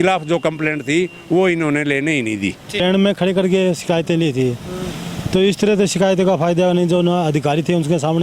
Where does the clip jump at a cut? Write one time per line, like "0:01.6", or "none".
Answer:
0:02.8